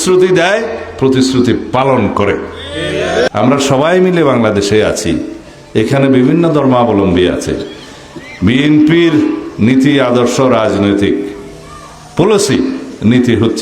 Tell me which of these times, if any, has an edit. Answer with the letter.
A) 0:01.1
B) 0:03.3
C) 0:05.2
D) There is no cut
B